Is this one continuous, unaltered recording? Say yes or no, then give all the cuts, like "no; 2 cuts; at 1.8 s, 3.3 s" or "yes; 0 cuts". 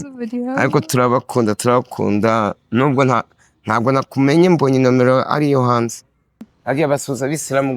no; 1 cut; at 6.5 s